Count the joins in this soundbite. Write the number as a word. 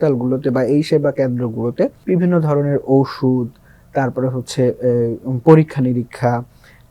one